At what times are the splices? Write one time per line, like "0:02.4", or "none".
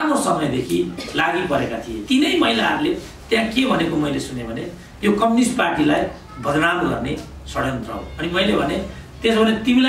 0:02.0